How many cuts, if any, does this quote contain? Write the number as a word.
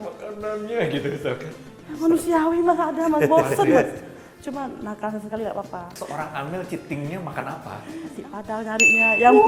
zero